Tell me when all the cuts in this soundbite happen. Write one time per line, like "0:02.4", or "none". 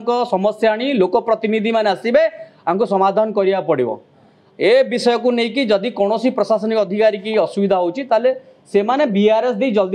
none

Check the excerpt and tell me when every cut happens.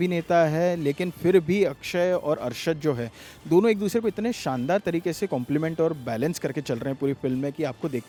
none

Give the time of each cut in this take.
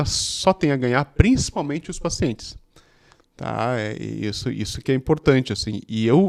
none

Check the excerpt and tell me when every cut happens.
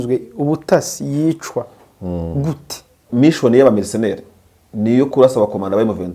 0:03.0

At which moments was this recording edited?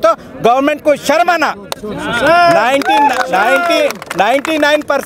none

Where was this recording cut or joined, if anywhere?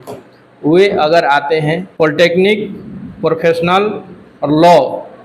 0:01.9

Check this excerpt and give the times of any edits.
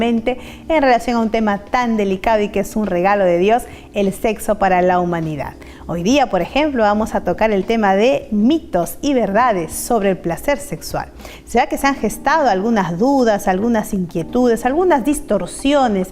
0:07.0

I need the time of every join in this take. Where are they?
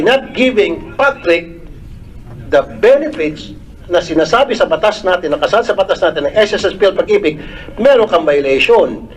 none

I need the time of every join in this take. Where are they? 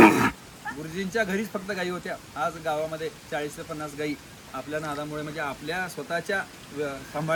none

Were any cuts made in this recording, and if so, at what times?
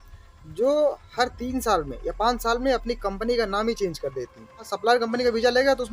0:04.7

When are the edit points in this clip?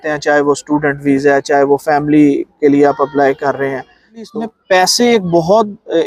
0:04.2

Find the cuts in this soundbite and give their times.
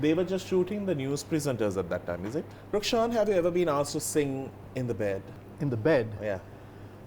0:02.6
0:04.6
0:05.4

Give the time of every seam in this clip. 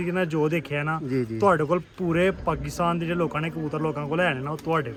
none

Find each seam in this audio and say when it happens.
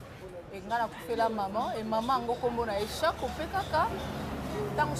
none

